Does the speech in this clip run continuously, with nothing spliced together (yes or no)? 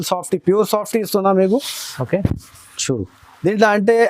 yes